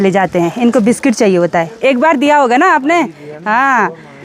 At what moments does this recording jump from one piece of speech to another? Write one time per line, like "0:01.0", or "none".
none